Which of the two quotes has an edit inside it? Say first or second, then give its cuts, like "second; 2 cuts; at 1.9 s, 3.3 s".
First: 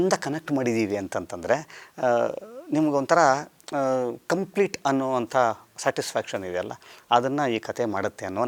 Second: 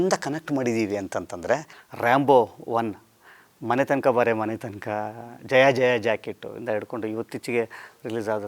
second; 1 cut; at 1.8 s